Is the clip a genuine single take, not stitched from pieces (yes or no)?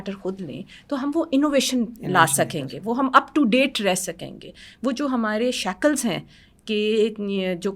yes